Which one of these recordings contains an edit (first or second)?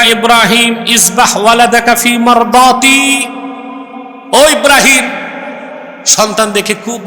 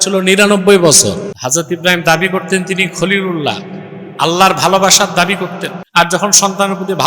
second